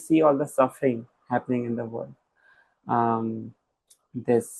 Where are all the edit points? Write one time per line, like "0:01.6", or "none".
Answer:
none